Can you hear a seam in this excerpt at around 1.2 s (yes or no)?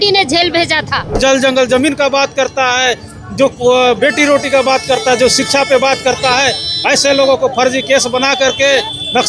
yes